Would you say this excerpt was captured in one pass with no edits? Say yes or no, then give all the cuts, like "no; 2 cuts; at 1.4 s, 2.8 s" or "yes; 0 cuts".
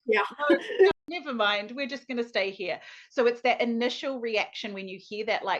no; 1 cut; at 0.9 s